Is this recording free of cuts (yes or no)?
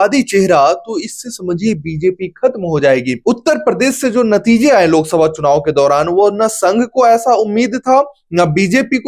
no